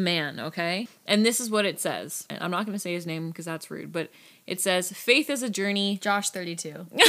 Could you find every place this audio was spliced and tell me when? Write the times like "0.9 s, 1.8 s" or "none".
0.9 s, 2.3 s